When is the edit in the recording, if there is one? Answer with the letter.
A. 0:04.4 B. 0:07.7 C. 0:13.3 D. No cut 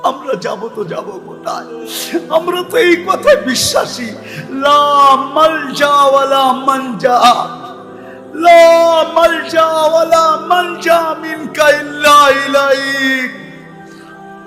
C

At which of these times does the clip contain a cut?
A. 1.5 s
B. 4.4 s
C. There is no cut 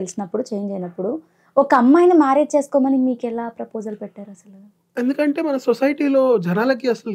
C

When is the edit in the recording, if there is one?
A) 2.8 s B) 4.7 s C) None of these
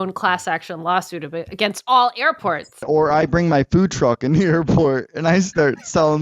A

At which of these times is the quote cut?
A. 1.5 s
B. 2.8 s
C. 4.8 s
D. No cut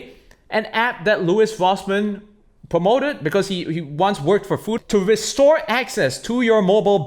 C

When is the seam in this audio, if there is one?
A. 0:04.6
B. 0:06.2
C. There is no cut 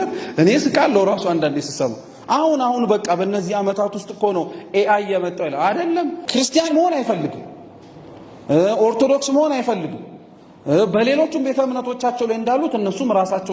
B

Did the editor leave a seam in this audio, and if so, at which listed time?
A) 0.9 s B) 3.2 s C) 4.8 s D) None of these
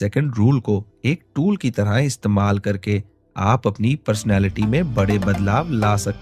D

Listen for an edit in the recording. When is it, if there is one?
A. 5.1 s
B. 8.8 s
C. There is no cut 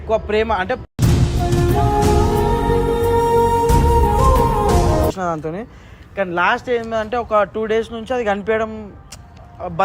A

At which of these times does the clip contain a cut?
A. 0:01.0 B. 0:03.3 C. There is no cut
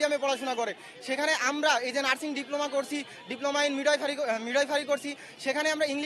C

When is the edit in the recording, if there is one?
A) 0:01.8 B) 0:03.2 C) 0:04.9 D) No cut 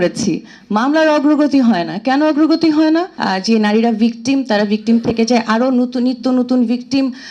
B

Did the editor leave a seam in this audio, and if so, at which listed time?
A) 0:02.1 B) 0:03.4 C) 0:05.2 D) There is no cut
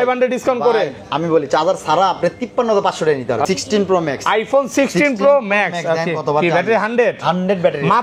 B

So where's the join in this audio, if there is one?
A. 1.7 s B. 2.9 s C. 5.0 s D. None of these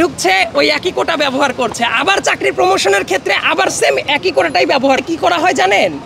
C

